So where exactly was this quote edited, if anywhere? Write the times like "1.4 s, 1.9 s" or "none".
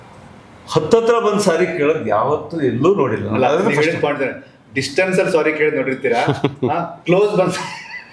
none